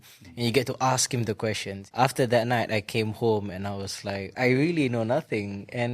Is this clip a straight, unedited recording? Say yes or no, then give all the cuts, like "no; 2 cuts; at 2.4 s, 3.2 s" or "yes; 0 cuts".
no; 2 cuts; at 1.8 s, 4.4 s